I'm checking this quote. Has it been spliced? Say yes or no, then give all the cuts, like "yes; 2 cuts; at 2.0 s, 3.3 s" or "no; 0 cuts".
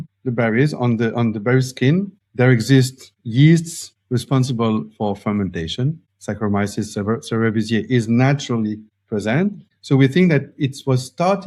no; 0 cuts